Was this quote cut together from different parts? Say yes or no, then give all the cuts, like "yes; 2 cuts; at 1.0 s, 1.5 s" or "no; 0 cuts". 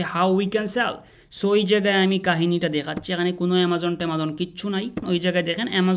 yes; 1 cut; at 5.0 s